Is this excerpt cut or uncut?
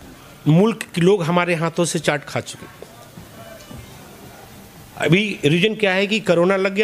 uncut